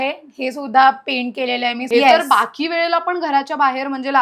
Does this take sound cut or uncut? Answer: cut